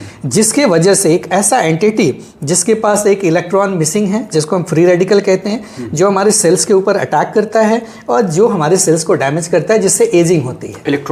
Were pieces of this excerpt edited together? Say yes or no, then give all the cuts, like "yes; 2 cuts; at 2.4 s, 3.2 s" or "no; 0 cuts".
no; 0 cuts